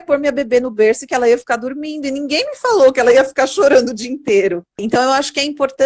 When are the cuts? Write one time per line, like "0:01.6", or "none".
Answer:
0:04.8

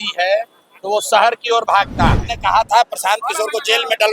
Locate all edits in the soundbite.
0:02.3

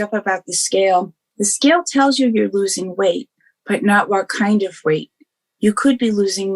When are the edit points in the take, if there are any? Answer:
0:01.2

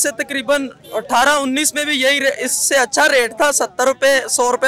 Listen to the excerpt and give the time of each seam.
none

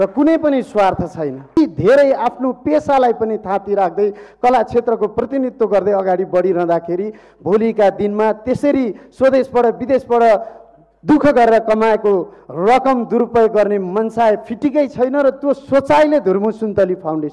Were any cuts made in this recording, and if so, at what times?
0:01.6

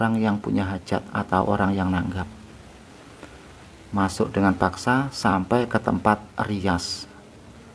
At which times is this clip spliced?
none

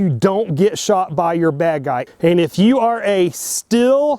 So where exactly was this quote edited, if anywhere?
0:02.0

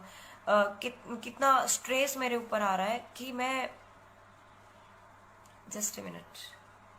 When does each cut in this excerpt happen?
0:04.5

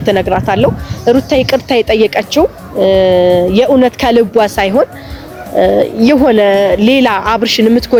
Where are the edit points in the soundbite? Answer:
none

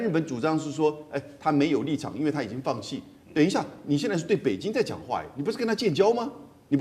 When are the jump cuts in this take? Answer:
none

